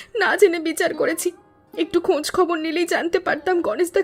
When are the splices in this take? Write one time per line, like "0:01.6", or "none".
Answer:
none